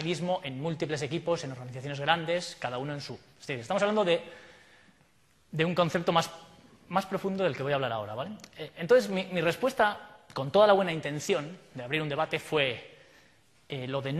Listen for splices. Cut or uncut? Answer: uncut